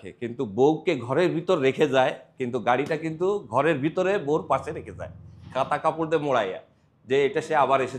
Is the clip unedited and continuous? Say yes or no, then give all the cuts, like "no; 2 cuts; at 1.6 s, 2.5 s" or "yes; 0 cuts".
yes; 0 cuts